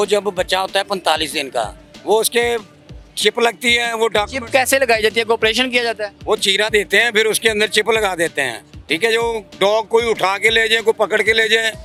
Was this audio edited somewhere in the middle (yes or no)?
no